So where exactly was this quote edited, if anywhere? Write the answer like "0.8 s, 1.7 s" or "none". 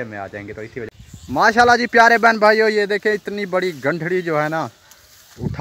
0.9 s

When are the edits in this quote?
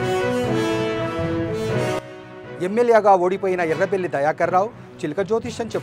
2.0 s

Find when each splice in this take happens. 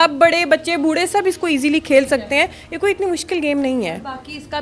none

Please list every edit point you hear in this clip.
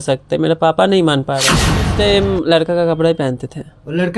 1.9 s

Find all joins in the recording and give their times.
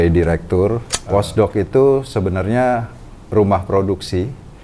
0.9 s

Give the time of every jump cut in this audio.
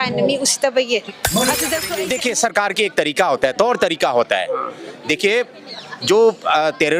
1.8 s

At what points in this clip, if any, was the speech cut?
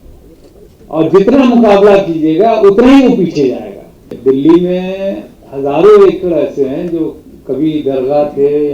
4.1 s

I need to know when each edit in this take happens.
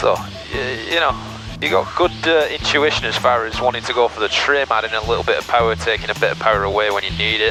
none

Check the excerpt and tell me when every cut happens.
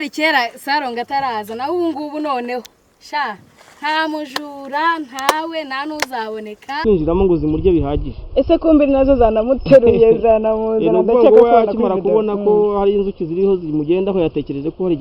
6.8 s

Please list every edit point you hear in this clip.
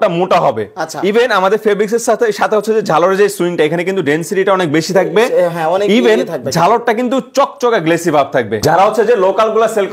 8.6 s

